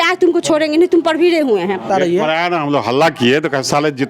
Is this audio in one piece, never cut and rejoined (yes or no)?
no